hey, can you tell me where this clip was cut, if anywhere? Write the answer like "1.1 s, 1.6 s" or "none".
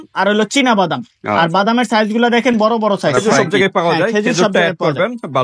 3.4 s